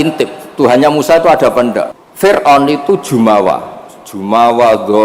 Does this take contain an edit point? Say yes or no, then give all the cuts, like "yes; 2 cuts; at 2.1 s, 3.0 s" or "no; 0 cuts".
yes; 1 cut; at 1.9 s